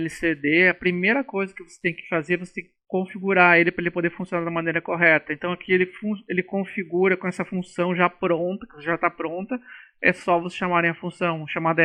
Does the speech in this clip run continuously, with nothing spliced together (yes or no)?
yes